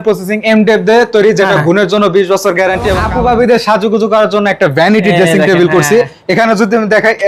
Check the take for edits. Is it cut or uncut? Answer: cut